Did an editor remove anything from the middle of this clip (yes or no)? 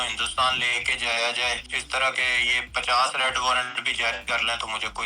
yes